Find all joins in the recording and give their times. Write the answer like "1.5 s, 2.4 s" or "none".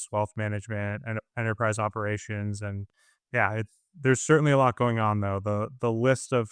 none